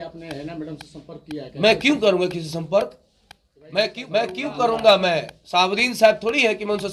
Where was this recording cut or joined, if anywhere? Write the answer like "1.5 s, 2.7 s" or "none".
4.0 s